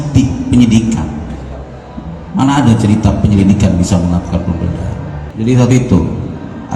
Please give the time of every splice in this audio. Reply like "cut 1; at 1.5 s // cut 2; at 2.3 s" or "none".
none

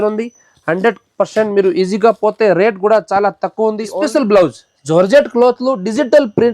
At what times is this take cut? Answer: cut 1; at 3.9 s

